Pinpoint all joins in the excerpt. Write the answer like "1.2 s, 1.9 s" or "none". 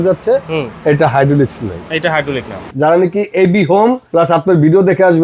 2.7 s, 4.0 s